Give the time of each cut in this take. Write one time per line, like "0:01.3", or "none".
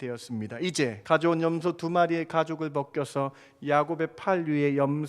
0:01.0